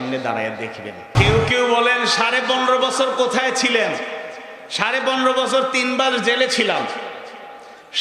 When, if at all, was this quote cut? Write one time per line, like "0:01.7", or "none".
0:01.1